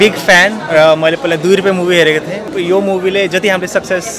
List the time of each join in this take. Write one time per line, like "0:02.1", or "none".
0:02.5